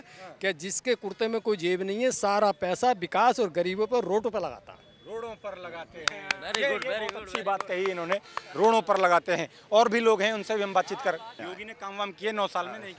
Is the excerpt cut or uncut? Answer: uncut